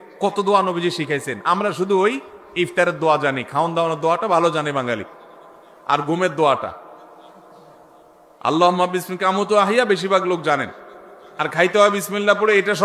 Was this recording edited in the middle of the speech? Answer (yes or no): no